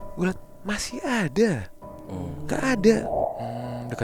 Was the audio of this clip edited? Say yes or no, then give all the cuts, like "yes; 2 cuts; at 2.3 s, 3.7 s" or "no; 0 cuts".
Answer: yes; 1 cut; at 3.1 s